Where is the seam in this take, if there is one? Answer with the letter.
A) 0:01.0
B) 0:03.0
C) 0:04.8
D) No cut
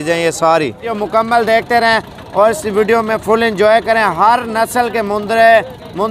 A